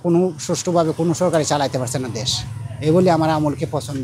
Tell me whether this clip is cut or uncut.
uncut